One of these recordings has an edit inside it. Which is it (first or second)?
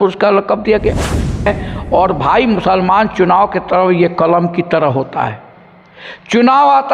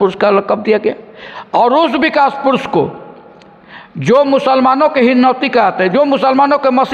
first